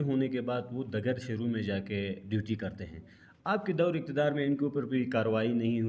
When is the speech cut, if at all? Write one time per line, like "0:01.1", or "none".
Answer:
none

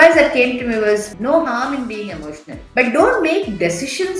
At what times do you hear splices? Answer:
0:01.1
0:02.7

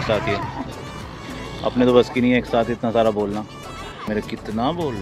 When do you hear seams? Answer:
0:04.1

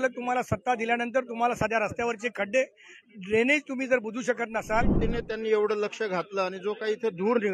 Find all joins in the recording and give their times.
0:05.0

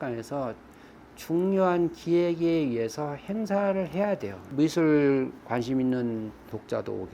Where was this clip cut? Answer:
0:04.4

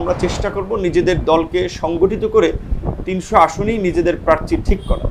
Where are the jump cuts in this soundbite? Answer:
none

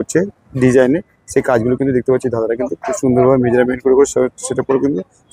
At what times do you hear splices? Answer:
none

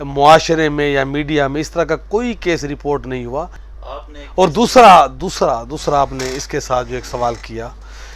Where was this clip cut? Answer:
0:03.6

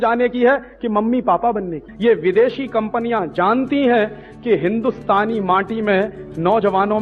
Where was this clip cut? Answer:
0:01.8

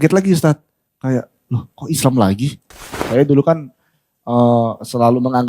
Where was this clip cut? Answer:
0:03.0

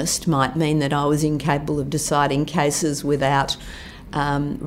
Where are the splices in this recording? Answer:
none

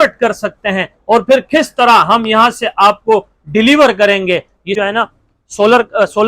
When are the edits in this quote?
0:04.7

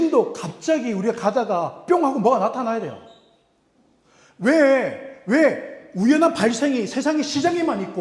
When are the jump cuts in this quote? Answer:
none

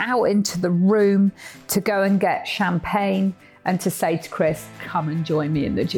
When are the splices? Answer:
0:04.7

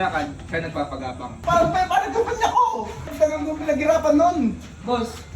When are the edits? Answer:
0:01.3
0:03.1

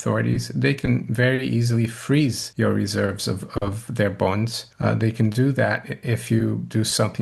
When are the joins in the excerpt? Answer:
0:02.4
0:04.6

